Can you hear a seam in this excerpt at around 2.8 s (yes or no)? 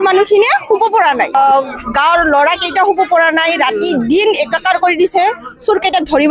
no